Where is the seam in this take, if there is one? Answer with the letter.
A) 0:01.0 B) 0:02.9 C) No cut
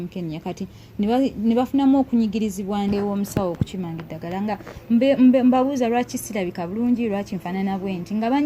B